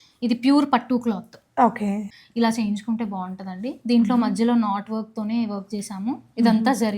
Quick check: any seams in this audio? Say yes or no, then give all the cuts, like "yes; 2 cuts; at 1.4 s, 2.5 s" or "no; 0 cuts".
yes; 1 cut; at 2.1 s